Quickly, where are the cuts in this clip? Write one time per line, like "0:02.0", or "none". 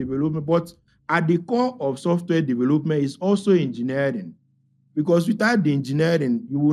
none